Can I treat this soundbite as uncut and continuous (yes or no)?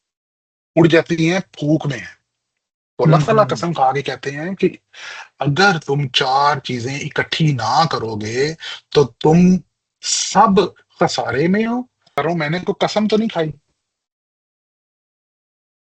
no